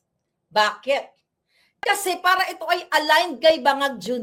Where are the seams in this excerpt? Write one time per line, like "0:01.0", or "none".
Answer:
none